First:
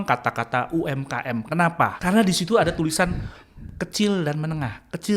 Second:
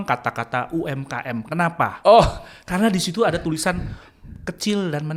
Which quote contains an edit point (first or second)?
first